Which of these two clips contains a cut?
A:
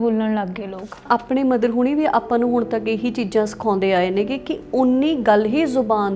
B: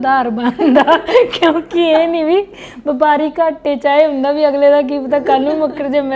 A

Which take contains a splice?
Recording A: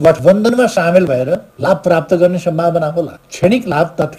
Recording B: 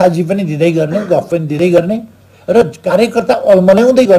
A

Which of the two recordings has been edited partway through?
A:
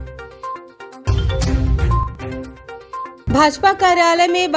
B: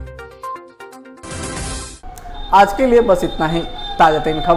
A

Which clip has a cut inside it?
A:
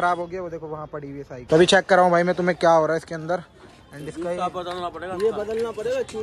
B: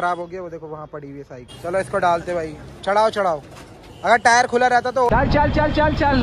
B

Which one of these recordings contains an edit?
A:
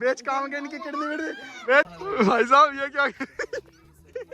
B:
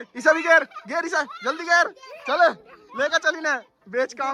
A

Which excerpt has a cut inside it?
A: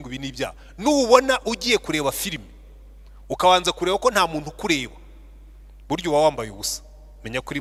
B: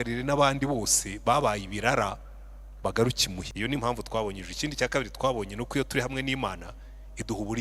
B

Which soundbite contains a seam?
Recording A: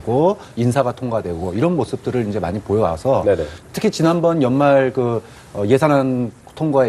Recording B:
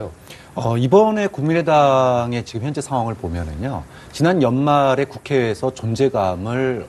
B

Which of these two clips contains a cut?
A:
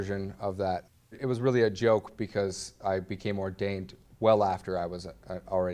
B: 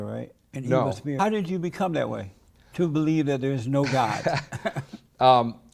B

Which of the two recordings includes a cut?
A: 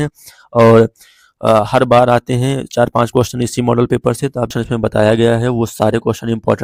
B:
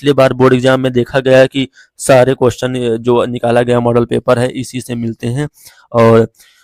A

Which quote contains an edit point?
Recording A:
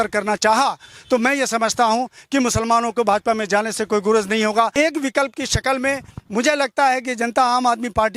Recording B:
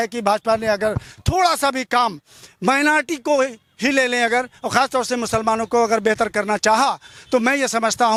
A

